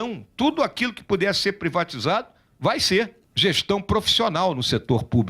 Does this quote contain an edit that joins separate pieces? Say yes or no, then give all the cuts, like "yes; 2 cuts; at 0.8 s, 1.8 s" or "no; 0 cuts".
yes; 1 cut; at 3.2 s